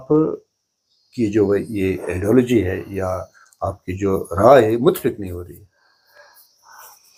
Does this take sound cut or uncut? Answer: uncut